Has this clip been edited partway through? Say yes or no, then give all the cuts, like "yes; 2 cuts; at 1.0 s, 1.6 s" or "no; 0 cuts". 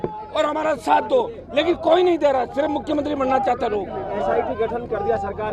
no; 0 cuts